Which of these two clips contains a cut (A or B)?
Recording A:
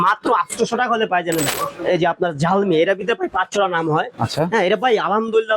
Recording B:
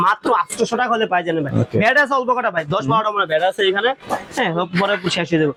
A